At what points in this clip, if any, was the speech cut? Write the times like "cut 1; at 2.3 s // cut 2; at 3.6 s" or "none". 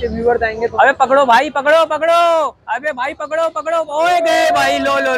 none